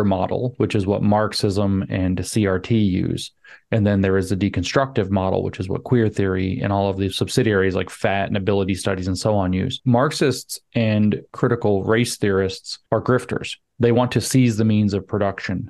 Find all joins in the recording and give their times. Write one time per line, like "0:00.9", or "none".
0:09.8
0:11.3
0:12.7